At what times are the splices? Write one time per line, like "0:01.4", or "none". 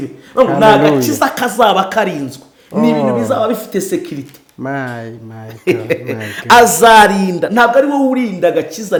none